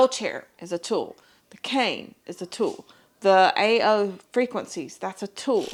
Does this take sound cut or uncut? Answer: uncut